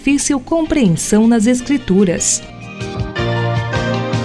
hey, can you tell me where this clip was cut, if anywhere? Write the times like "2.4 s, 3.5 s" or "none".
2.3 s